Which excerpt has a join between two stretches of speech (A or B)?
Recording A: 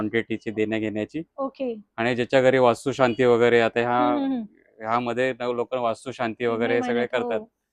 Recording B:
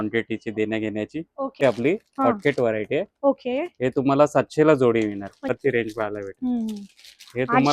B